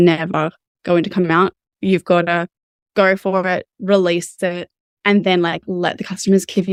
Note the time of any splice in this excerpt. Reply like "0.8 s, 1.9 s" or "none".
none